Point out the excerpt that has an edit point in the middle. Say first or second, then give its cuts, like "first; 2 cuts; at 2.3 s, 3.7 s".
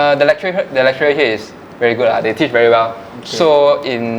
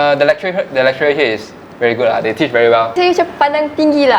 second; 1 cut; at 3.0 s